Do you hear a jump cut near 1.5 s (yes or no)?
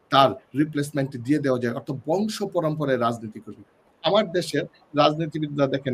no